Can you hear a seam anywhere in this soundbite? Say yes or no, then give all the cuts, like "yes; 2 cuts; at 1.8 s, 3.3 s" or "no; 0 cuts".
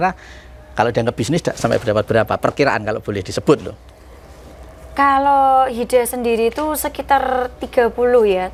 no; 0 cuts